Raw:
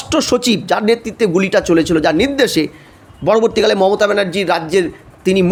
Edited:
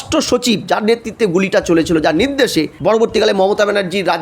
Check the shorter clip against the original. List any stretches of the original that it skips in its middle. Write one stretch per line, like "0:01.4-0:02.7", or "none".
0:02.7-0:03.2